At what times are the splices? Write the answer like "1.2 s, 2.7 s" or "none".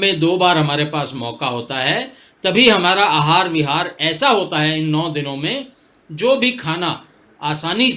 none